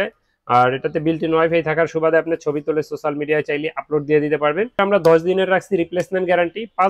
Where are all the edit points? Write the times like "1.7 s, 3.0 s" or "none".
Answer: 4.7 s